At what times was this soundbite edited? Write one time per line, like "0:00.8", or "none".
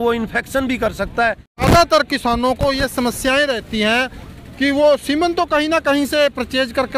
0:01.6